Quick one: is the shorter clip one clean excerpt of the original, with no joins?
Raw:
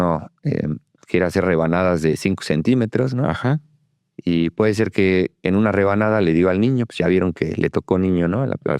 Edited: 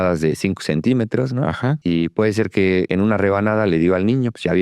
no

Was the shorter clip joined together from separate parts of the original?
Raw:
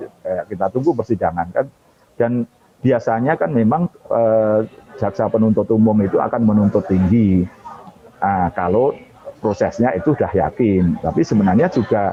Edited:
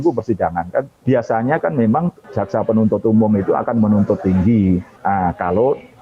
yes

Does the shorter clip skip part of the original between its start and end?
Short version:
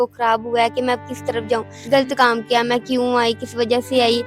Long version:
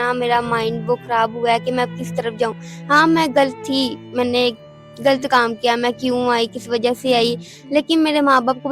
yes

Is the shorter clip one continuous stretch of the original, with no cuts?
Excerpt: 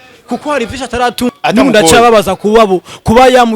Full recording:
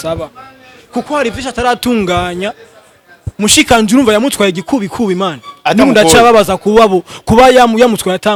no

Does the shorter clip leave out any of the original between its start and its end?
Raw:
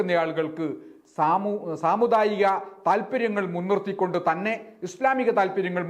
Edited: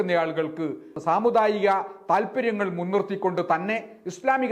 yes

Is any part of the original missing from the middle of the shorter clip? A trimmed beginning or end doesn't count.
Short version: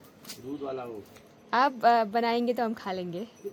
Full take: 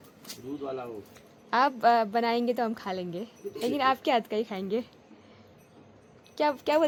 no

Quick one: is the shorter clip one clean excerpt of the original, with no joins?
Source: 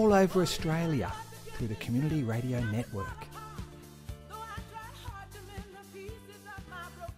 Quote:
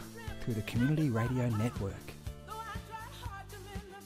no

